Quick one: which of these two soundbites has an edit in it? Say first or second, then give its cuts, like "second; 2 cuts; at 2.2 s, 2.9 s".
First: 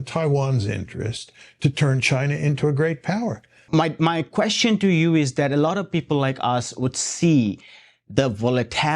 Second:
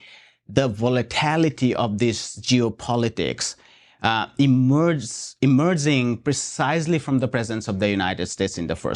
first; 1 cut; at 3.5 s